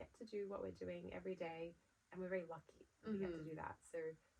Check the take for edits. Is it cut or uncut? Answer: uncut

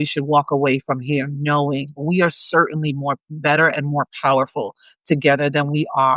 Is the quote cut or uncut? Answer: cut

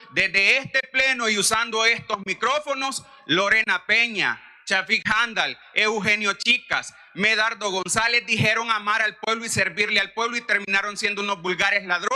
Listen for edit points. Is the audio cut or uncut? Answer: uncut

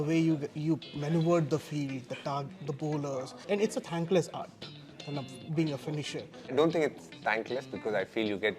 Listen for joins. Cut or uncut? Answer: cut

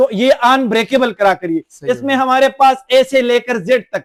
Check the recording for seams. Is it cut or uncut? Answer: uncut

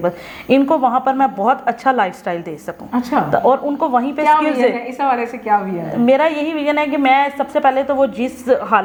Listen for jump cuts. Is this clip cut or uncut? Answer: uncut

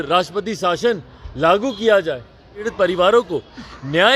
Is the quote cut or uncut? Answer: cut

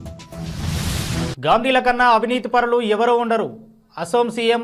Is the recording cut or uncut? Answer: uncut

